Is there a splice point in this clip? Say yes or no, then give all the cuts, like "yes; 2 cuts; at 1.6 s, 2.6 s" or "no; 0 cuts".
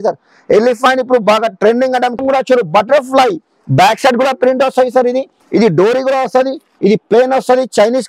yes; 3 cuts; at 2.2 s, 5.4 s, 6.6 s